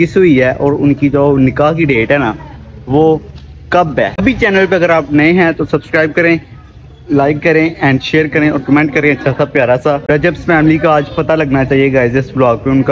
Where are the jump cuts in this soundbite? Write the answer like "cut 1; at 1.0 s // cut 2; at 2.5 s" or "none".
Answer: cut 1; at 4.2 s // cut 2; at 10.0 s